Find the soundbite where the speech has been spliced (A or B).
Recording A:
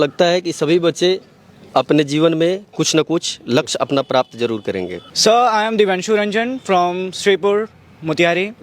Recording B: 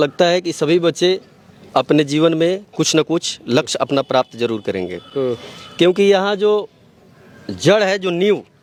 A